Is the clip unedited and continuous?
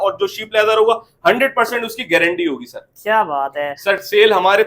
no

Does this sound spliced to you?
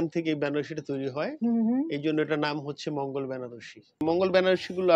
yes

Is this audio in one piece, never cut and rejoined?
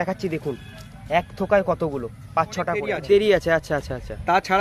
no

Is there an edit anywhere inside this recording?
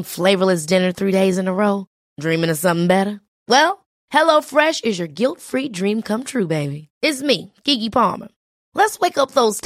no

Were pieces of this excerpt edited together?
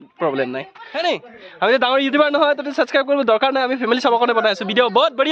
yes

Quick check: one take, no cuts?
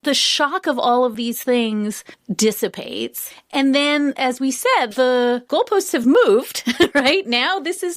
yes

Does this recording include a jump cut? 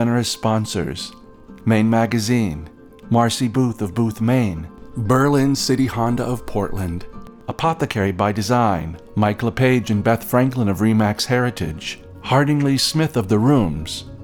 no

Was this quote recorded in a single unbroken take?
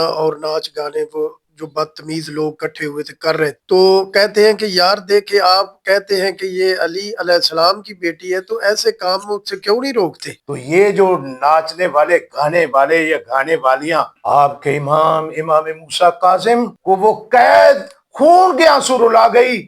no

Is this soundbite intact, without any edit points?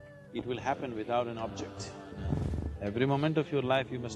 no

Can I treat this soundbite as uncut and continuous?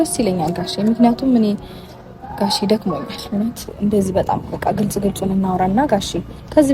no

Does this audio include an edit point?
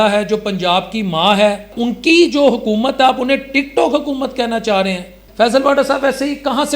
yes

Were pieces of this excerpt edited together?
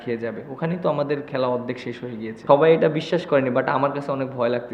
yes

